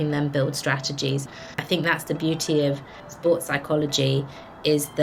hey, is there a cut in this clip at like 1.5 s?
yes; 1 cut; at 1.5 s

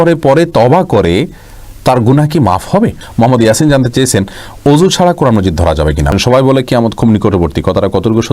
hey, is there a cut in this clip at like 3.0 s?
yes; 2 cuts; at 3.0 s, 6.1 s

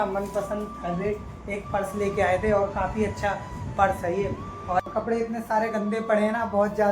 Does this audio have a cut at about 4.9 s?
yes; 1 cut; at 4.9 s

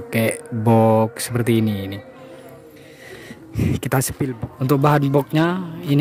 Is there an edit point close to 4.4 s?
yes; 1 cut; at 4.4 s

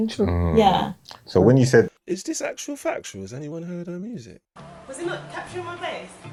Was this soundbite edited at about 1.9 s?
no; 0 cuts

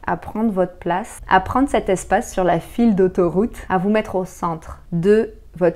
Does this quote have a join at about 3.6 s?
yes; 3 cuts; at 1.1 s, 3.6 s, 4.7 s

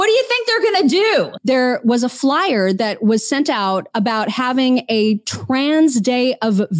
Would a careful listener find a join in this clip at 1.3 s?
yes; 1 cut; at 1.3 s

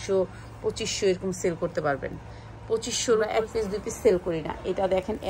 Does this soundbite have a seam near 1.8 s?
no; 1 cut; at 3.3 s

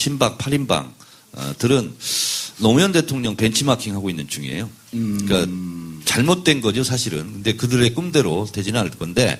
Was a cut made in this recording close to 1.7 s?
no; 0 cuts

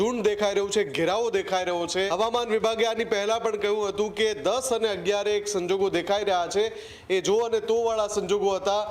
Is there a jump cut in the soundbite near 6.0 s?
no; 1 cut; at 2.1 s

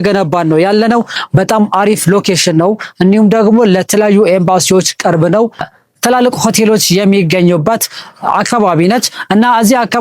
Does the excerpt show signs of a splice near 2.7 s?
no; 2 cuts; at 1.2 s, 5.6 s

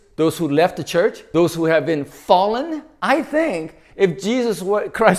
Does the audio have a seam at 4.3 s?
no; 2 cuts; at 1.2 s, 2.9 s

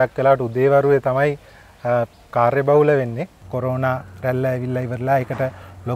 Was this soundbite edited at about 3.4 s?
yes; 1 cut; at 3.4 s

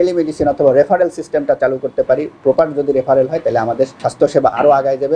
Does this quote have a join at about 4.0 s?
yes; 1 cut; at 4.0 s

